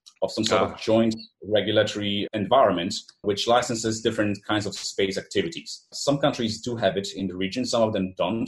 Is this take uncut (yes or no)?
no